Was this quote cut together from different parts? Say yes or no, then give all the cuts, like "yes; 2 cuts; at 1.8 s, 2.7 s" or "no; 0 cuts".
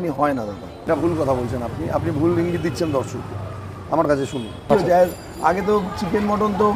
yes; 2 cuts; at 0.8 s, 4.5 s